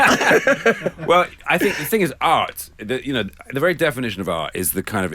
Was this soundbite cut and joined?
no; 0 cuts

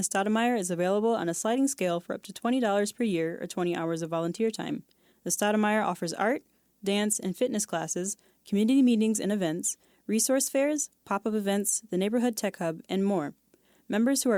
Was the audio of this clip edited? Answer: no; 0 cuts

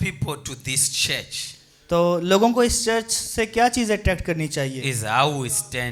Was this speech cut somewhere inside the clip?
no; 0 cuts

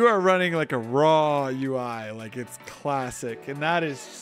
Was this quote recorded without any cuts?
yes; 0 cuts

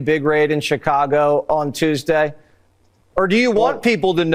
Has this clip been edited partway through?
no; 0 cuts

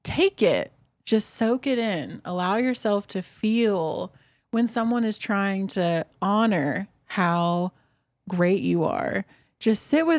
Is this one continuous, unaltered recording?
yes; 0 cuts

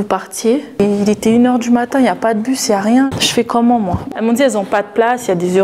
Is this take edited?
yes; 3 cuts; at 0.8 s, 3.1 s, 4.1 s

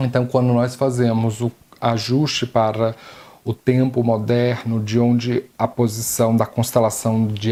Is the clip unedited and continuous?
yes; 0 cuts

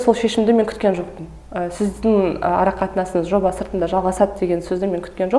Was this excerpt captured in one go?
yes; 0 cuts

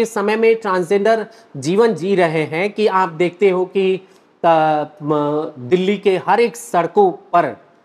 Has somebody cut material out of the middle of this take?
no; 0 cuts

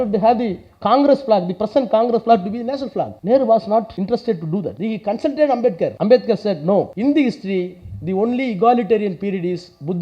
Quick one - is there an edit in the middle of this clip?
yes; 5 cuts; at 3.2 s, 3.9 s, 4.8 s, 6.0 s, 6.9 s

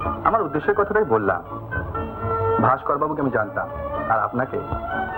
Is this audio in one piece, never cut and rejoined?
yes; 0 cuts

